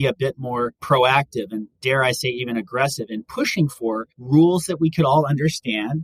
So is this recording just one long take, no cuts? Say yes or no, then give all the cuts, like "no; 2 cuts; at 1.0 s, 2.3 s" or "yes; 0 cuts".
no; 1 cut; at 4.1 s